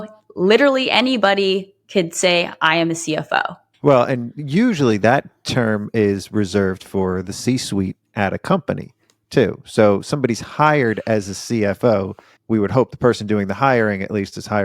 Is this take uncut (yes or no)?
yes